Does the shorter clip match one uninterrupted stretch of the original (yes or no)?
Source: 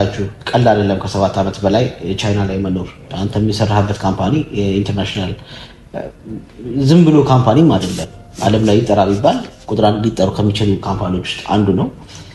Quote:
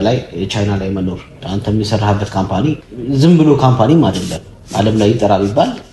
no